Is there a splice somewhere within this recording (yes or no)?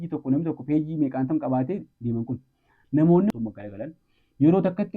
yes